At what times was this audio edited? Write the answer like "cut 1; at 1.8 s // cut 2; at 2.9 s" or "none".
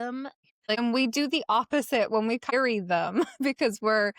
cut 1; at 0.8 s // cut 2; at 2.5 s